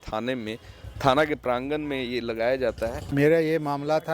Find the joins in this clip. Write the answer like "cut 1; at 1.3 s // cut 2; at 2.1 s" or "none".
cut 1; at 3.0 s

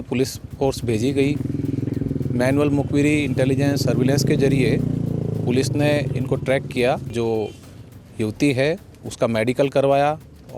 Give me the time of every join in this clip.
cut 1; at 7.1 s

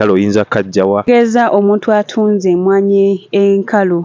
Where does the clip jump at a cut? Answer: cut 1; at 1.0 s

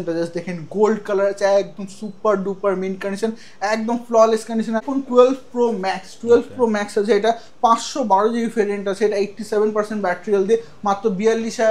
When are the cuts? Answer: cut 1; at 4.8 s

